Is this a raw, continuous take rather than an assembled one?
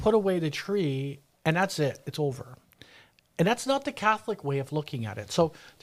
yes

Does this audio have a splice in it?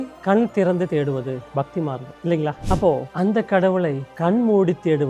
no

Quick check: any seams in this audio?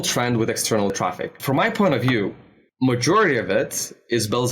yes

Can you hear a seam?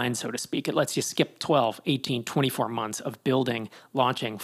no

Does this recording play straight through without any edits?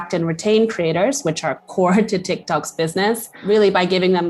no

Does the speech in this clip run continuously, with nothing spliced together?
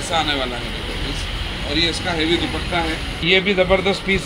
no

